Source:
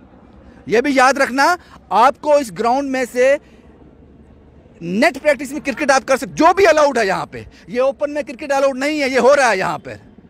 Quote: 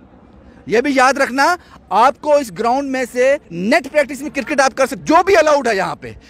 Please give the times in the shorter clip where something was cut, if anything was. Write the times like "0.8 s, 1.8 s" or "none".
3.5 s